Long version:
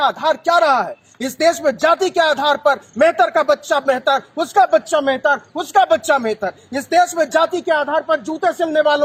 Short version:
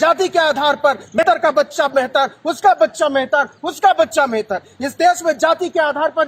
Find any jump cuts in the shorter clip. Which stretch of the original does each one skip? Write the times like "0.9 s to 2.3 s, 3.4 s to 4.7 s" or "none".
3.0 s to 3.1 s

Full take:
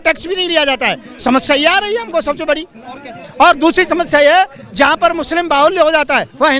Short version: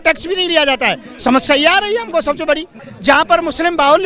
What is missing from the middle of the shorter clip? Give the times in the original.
2.9 s to 4.6 s

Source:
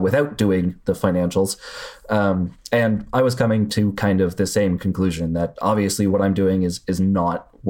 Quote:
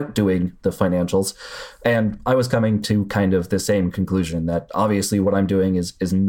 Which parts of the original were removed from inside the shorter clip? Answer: 1.9 s to 2.6 s

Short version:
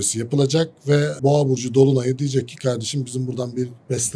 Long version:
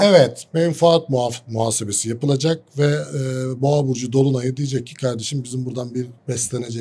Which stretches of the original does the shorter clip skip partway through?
3.1 s to 3.5 s

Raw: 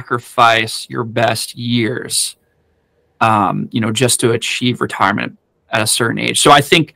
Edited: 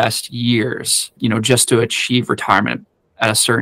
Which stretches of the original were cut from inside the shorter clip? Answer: 2.4 s to 3.7 s

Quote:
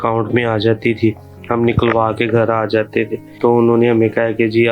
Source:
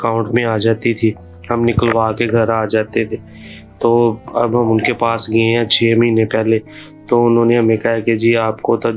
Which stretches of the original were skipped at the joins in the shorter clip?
3.2 s to 6.9 s

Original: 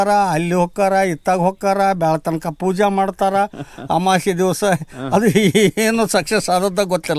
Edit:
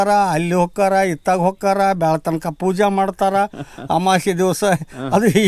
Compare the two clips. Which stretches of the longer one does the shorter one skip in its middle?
none

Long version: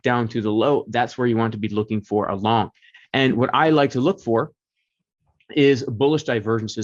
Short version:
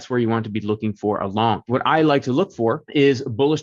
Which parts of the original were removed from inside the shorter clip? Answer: 2.8 s to 3.4 s, 4.5 s to 5.4 s

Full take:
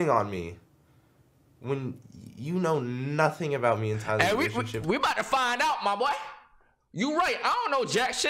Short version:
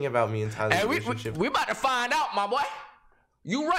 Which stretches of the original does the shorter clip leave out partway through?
none

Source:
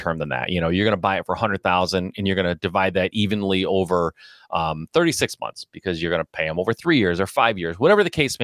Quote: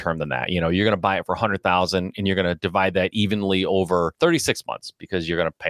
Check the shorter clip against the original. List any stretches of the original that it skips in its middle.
4.1 s to 4.9 s

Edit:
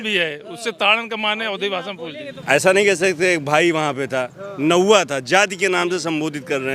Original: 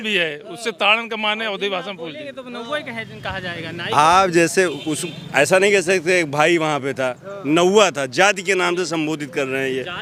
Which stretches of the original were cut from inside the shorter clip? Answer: 2.3 s to 5.1 s

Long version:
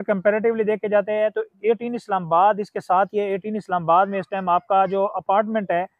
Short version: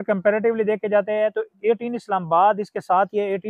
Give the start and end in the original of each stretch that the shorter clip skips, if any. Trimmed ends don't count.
none

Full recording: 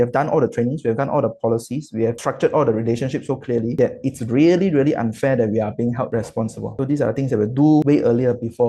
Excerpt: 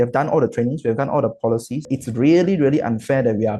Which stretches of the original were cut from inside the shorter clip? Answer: 1.8 s to 4.0 s

